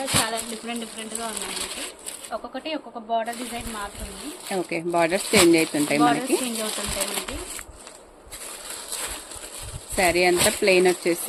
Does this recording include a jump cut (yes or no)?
no